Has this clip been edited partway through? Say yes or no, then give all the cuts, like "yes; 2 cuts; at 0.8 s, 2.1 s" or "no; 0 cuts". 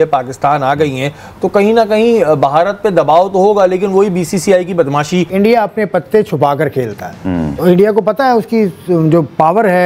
yes; 1 cut; at 5.3 s